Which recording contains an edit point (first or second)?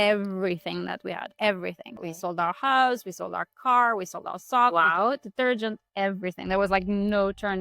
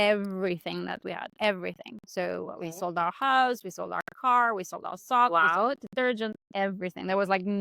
first